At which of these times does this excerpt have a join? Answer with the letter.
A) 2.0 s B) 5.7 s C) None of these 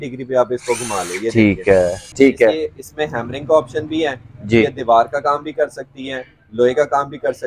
A